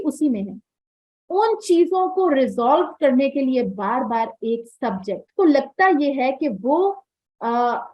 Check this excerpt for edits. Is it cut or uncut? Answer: cut